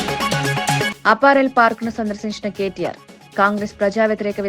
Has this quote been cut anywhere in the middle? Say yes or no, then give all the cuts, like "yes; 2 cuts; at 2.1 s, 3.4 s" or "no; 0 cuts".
yes; 1 cut; at 0.9 s